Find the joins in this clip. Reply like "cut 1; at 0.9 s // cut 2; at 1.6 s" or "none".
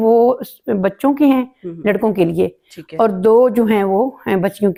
none